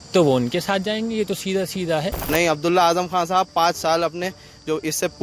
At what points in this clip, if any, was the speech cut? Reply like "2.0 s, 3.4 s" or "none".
2.3 s